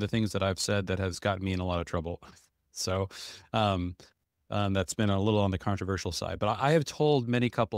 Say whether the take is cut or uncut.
uncut